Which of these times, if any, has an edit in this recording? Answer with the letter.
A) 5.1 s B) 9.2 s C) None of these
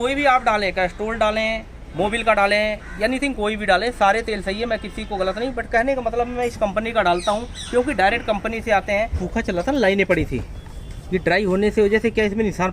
B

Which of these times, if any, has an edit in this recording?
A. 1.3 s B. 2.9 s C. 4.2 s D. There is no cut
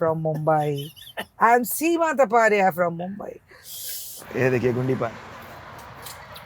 C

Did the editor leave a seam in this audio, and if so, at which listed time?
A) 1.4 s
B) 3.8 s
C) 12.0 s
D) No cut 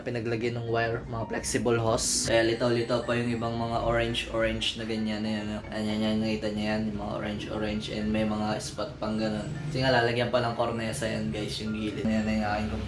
C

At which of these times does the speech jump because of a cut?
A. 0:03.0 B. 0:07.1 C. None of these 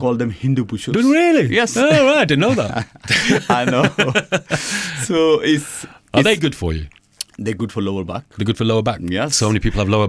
C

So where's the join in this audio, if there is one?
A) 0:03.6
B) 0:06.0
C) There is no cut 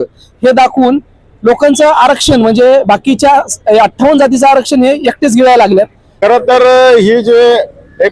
B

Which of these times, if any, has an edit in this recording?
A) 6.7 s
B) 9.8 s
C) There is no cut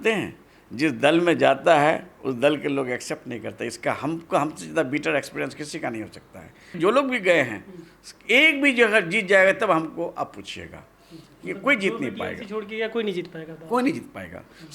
A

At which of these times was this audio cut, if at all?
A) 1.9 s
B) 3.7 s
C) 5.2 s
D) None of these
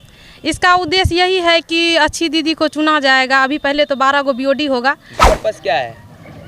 C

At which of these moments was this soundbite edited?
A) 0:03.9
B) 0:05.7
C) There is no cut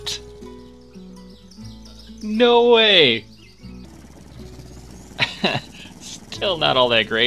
A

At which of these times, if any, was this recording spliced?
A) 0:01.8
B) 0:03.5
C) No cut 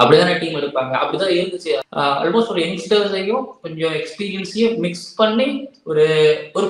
A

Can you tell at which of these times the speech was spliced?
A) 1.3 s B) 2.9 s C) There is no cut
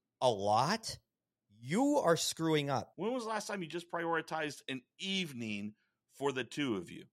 B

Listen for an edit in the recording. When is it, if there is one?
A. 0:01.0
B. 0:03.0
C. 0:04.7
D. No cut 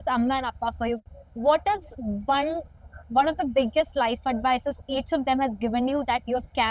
A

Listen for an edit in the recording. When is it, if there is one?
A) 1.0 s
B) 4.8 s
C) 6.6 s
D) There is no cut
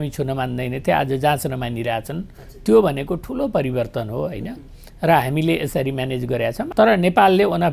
C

